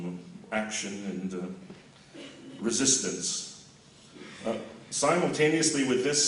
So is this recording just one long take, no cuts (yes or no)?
yes